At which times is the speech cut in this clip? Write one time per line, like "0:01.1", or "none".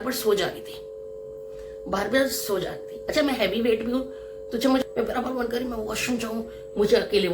0:04.9